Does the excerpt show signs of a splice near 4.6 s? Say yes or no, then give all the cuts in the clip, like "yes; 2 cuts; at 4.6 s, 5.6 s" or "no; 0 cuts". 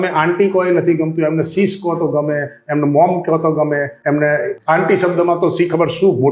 yes; 2 cuts; at 3.9 s, 4.6 s